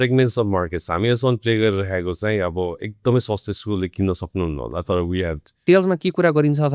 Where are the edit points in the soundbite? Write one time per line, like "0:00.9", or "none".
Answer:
0:05.4